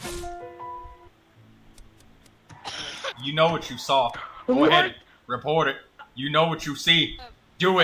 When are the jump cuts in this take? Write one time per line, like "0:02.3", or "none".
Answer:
0:01.0